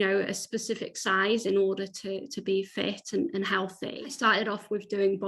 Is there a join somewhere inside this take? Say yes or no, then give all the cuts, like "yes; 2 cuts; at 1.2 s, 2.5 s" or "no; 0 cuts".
yes; 1 cut; at 3.8 s